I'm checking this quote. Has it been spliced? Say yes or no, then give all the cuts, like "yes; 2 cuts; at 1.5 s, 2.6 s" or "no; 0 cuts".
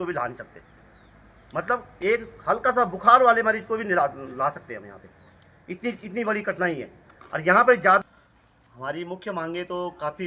no; 0 cuts